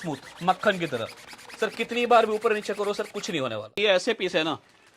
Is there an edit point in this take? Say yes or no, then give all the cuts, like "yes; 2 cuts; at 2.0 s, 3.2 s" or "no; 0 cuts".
yes; 1 cut; at 3.7 s